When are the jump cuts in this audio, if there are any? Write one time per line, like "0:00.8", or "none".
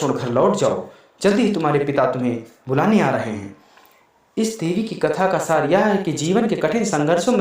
0:04.6